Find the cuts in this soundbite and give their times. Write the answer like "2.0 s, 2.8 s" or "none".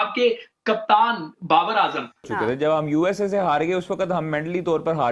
2.3 s